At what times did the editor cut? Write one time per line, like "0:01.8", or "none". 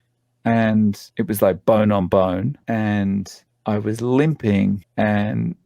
0:01.1
0:02.6
0:04.8